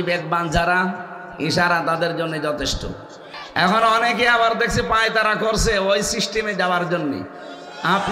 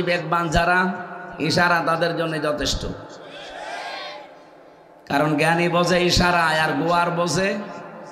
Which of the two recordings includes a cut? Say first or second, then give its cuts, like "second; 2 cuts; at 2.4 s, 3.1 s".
first; 1 cut; at 3.4 s